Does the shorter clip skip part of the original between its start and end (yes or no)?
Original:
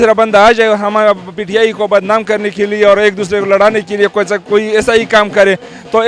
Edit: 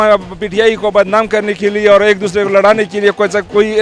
no